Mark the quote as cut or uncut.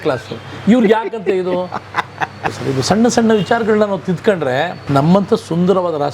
cut